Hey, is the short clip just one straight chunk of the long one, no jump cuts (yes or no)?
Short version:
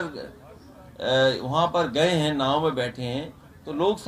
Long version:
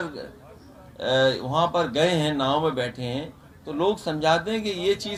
yes